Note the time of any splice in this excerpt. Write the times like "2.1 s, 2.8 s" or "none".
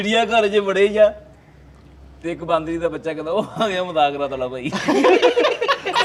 none

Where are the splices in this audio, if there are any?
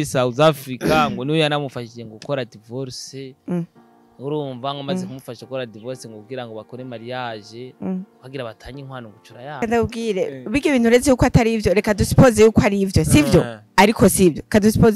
9.6 s

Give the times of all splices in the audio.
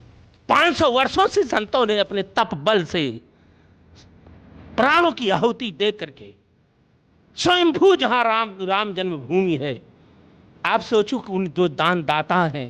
none

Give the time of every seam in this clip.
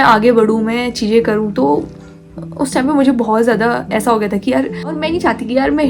5.0 s

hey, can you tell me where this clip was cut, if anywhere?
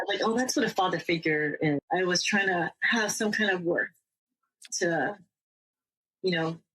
1.8 s, 4.7 s

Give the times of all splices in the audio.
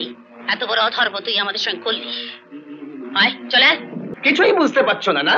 4.0 s

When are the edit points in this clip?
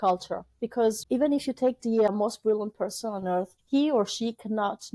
1.0 s, 2.1 s, 3.6 s

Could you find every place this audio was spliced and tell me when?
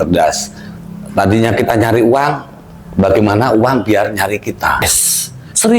4.8 s

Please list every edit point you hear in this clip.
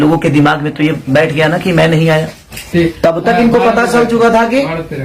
2.7 s

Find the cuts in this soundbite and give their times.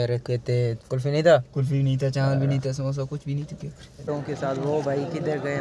4.1 s

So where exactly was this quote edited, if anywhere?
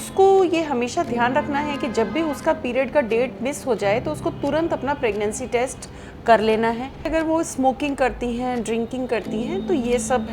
7.1 s

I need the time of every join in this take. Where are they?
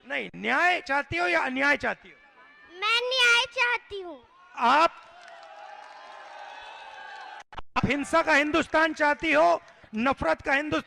none

